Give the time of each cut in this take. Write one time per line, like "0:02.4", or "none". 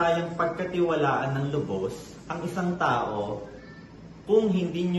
none